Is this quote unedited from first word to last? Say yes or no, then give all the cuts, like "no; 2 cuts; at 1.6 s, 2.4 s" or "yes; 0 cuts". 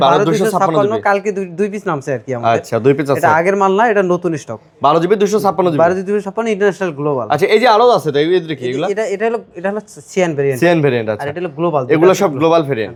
yes; 0 cuts